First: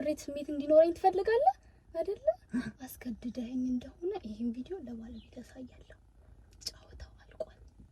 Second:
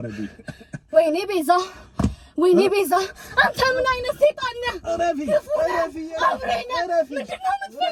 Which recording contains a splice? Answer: first; 1 cut; at 1.9 s

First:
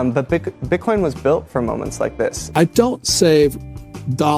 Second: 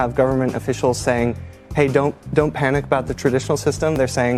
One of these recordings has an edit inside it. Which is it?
first; 1 cut; at 2.4 s

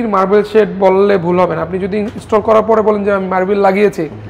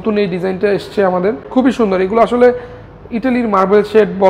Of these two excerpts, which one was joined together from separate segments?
second; 1 cut; at 1.5 s

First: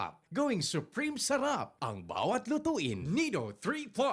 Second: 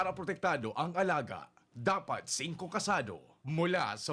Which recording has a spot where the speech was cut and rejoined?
first; 1 cut; at 3.0 s

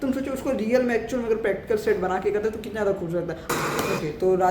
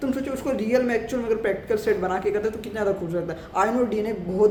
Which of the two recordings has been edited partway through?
first; 1 cut; at 3.4 s

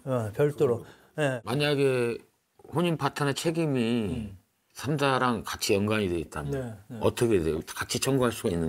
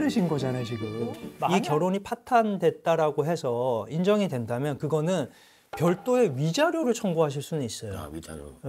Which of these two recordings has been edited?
second; 1 cut; at 1.5 s

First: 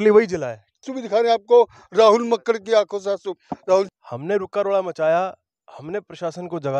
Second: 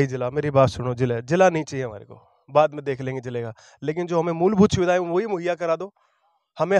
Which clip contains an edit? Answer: first; 2 cuts; at 1.0 s, 4.0 s

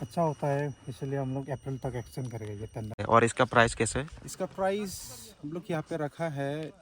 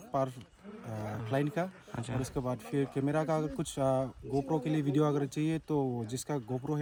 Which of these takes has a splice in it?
first; 1 cut; at 2.9 s

